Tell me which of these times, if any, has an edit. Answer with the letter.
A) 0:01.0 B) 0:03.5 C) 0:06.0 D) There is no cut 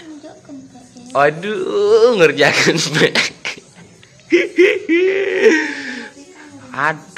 D